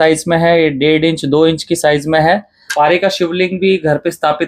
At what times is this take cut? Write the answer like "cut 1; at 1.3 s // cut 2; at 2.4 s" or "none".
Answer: cut 1; at 2.6 s